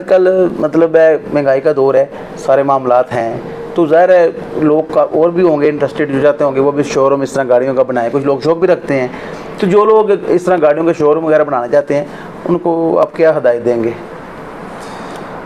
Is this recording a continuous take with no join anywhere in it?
yes; 0 cuts

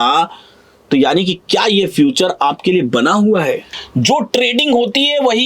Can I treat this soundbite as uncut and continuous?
no; 1 cut; at 3.8 s

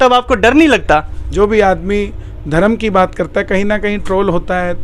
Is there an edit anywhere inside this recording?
yes; 1 cut; at 1.2 s

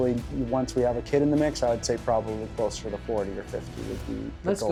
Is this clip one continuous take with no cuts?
yes; 0 cuts

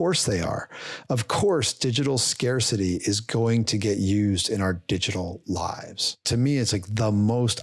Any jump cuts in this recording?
yes; 1 cut; at 6.2 s

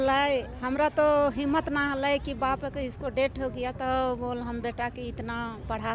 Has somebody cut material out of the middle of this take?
no; 0 cuts

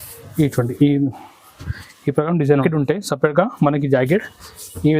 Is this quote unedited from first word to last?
no; 1 cut; at 2.6 s

